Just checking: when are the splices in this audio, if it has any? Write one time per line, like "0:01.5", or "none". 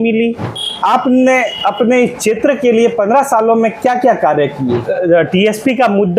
0:00.8
0:04.8